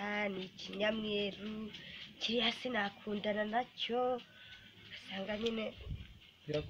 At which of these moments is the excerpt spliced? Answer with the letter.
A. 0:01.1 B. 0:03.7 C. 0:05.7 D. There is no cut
D